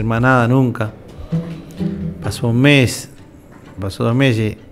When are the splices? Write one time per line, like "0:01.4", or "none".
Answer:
0:03.8